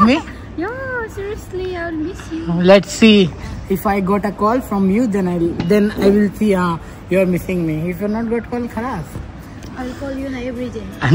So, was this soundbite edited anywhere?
no; 0 cuts

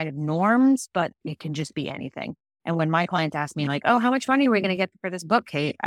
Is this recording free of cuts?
no; 1 cut; at 1.2 s

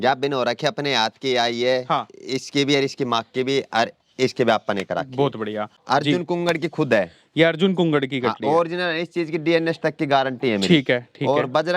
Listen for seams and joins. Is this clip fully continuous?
no; 1 cut; at 5.7 s

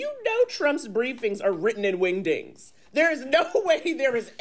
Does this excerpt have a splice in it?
no; 0 cuts

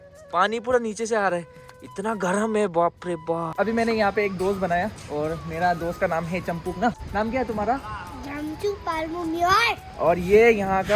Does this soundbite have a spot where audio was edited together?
yes; 2 cuts; at 3.5 s, 7.0 s

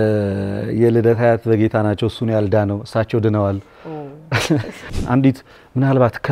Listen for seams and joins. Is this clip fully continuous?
no; 1 cut; at 4.8 s

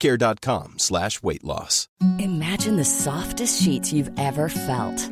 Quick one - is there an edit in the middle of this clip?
yes; 1 cut; at 1.8 s

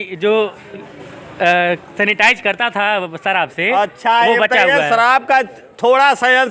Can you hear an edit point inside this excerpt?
no; 0 cuts

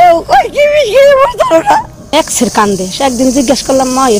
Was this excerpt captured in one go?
no; 1 cut; at 2.1 s

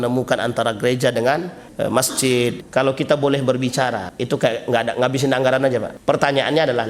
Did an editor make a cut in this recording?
yes; 4 cuts; at 1.6 s, 2.6 s, 4.1 s, 5.9 s

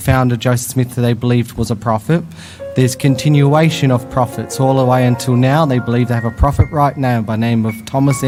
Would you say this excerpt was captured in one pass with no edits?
yes; 0 cuts

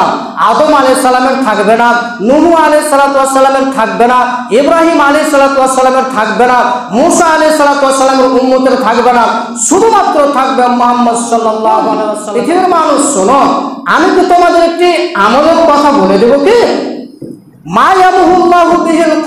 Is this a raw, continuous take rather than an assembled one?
no; 1 cut; at 12.2 s

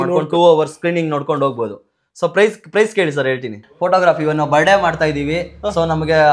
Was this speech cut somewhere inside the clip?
yes; 1 cut; at 3.6 s

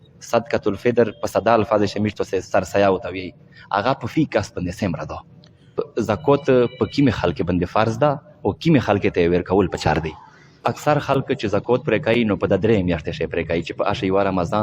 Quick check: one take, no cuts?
no; 2 cuts; at 5.9 s, 10.6 s

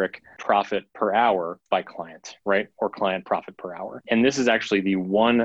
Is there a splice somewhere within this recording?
yes; 3 cuts; at 0.7 s, 1.6 s, 4.0 s

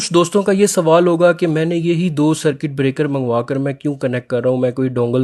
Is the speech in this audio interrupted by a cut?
no; 0 cuts

